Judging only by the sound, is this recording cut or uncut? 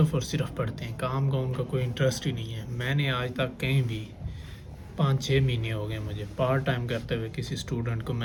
uncut